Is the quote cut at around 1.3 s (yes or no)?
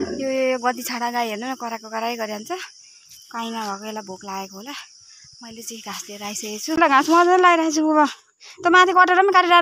no